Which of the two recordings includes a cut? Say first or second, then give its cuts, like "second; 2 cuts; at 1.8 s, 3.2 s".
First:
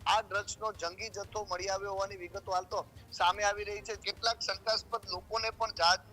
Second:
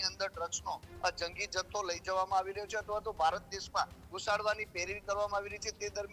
first; 1 cut; at 4.0 s